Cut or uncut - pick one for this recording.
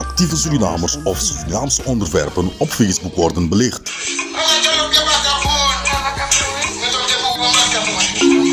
uncut